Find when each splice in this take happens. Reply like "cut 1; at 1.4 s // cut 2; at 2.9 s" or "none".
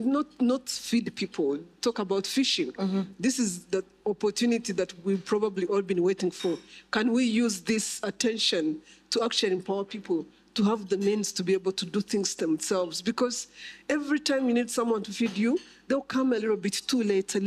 none

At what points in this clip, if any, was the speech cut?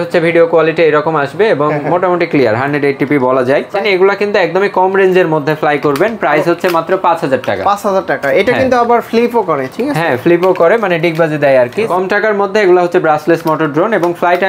cut 1; at 3.7 s // cut 2; at 11.9 s

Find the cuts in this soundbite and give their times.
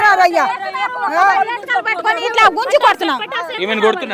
none

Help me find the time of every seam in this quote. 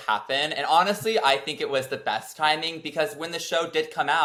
none

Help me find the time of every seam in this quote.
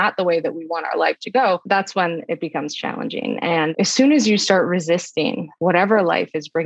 cut 1; at 1.6 s // cut 2; at 3.7 s // cut 3; at 5.5 s

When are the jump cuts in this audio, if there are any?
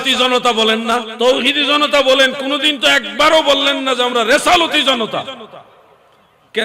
cut 1; at 1.1 s

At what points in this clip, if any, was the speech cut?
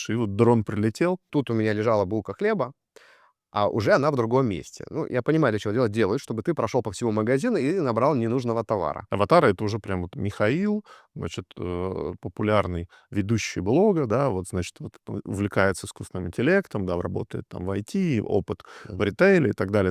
cut 1; at 1.3 s // cut 2; at 9.0 s

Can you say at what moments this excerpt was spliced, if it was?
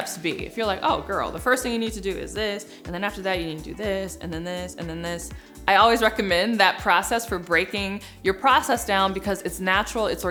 none

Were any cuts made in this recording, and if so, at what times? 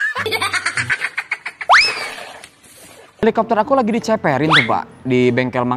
cut 1; at 3.2 s

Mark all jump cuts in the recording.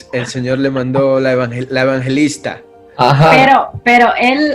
none

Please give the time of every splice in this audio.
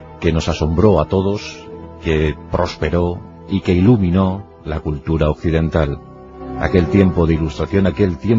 cut 1; at 4.0 s

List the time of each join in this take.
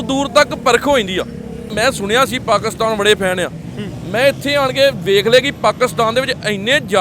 cut 1; at 1.7 s

